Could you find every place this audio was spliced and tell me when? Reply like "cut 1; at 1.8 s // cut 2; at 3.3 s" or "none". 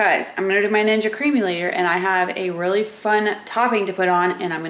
none